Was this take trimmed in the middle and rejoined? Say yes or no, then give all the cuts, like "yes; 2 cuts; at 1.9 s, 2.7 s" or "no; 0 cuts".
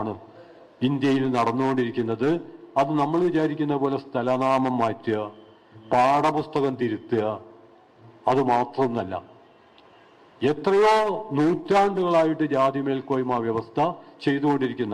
no; 0 cuts